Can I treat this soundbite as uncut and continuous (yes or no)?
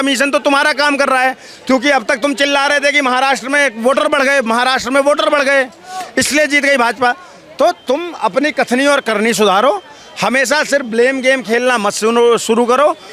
yes